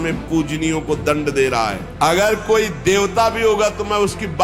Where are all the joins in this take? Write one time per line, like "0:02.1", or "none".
0:01.8